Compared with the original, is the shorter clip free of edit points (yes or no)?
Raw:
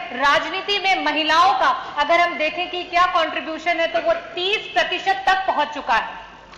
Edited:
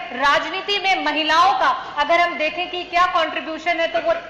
yes